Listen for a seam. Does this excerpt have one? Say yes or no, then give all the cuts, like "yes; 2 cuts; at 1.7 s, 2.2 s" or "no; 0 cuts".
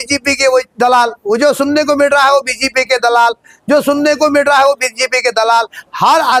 no; 0 cuts